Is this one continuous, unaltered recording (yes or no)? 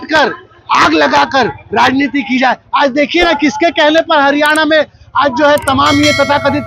yes